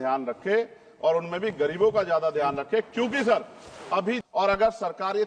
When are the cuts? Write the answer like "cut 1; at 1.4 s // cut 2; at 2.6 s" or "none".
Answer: cut 1; at 4.2 s